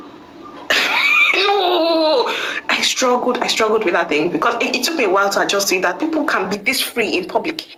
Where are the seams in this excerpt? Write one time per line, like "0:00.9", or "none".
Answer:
none